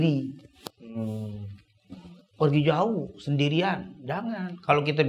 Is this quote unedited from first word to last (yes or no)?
yes